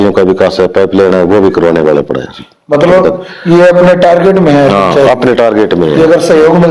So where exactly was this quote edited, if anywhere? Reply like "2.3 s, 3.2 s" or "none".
none